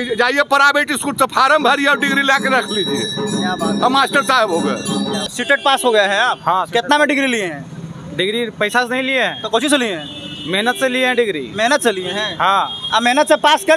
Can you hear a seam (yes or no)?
yes